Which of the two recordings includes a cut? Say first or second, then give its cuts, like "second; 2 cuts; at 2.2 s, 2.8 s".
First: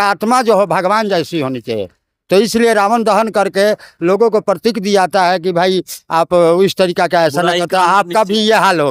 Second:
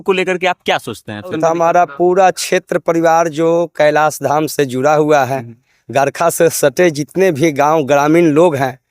second; 1 cut; at 1.3 s